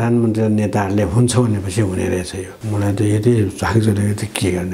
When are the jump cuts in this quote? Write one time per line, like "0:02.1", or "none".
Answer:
0:02.5